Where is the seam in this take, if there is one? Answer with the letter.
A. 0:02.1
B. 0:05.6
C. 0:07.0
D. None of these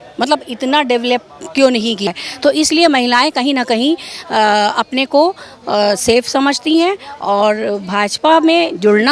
A